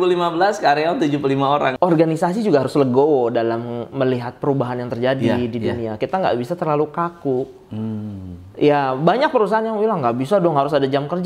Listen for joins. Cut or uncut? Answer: cut